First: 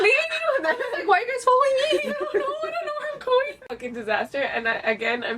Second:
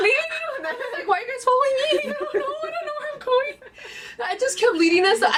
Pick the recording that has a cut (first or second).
first